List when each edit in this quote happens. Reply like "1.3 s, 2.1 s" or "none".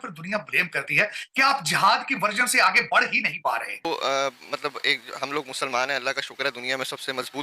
3.8 s

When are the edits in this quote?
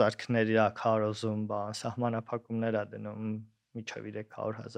none

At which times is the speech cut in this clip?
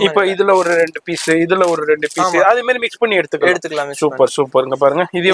none

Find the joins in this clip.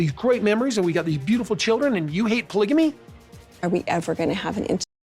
3.0 s

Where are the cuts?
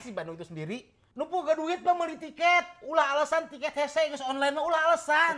1.0 s

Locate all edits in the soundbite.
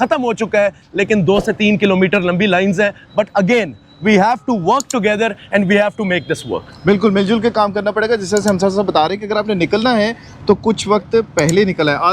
none

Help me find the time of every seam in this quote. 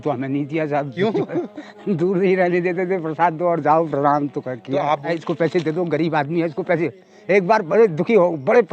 5.1 s

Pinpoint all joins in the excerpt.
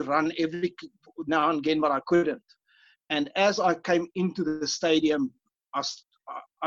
none

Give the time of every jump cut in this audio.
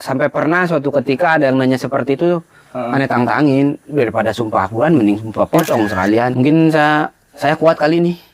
6.3 s

